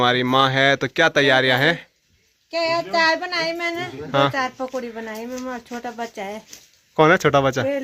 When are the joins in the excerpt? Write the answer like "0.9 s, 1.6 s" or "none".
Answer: none